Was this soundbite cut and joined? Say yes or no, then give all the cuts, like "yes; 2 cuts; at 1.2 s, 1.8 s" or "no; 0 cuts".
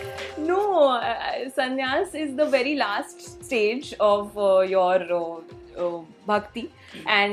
no; 0 cuts